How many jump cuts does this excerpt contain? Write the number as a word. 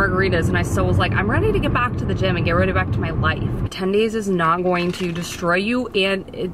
one